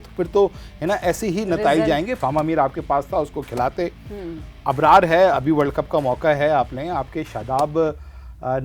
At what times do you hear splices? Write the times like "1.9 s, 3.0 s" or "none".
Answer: 2.2 s